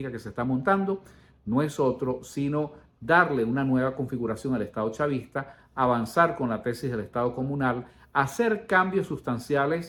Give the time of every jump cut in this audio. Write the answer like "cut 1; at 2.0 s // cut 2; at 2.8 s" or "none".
none